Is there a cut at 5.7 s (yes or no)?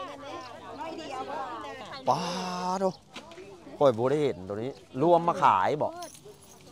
no